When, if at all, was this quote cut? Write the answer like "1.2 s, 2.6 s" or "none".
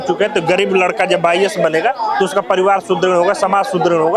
none